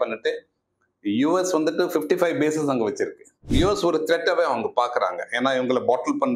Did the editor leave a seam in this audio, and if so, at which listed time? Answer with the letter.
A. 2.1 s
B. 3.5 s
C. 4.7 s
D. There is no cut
B